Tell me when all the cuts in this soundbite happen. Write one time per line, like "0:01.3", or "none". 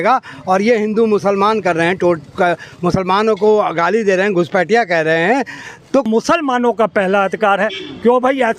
0:06.1